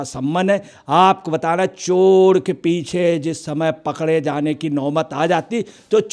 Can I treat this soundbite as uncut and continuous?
yes; 0 cuts

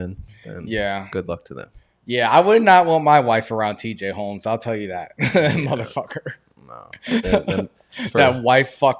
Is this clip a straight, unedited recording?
yes; 0 cuts

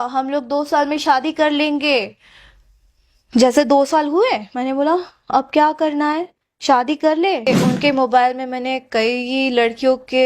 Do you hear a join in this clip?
yes; 1 cut; at 7.5 s

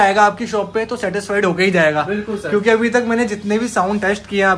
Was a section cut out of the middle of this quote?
no; 0 cuts

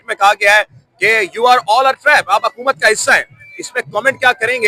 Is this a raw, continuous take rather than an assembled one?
yes; 0 cuts

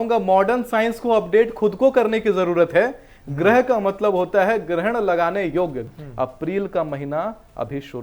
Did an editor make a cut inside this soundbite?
yes; 1 cut; at 5.8 s

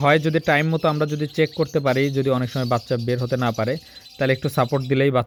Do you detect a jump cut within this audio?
no; 0 cuts

